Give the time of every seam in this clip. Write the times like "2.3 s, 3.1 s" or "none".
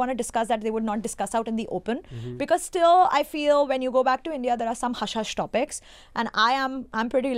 none